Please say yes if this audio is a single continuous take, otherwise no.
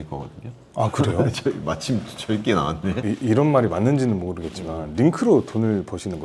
no